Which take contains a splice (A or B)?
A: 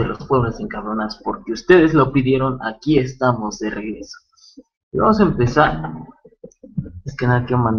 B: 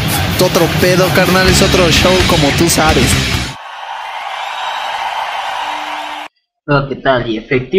B